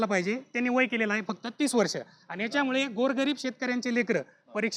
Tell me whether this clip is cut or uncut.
uncut